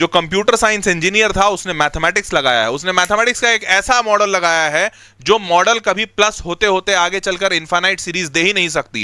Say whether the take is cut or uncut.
uncut